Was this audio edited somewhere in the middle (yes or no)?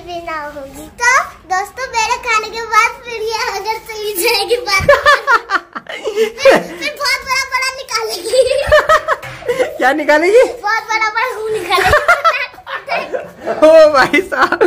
no